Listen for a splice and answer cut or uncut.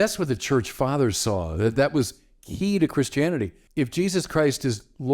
cut